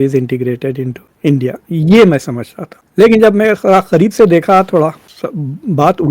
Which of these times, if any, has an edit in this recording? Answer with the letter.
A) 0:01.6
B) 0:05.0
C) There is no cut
B